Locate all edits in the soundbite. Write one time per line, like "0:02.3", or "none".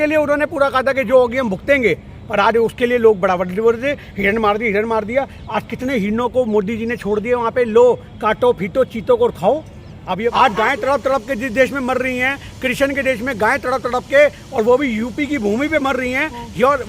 0:10.3